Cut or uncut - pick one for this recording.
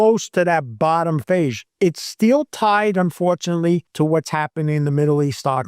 cut